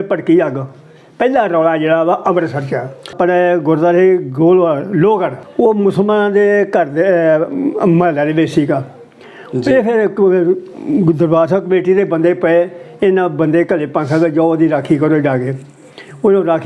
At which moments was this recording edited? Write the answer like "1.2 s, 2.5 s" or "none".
3.0 s